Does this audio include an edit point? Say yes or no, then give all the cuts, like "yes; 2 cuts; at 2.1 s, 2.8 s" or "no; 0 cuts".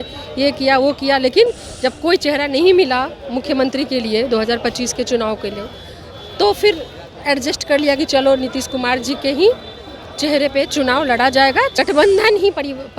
yes; 1 cut; at 11.7 s